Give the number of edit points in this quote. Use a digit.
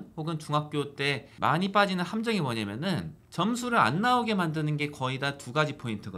0